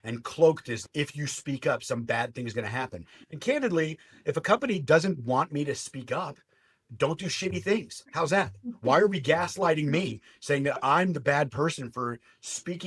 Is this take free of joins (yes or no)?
yes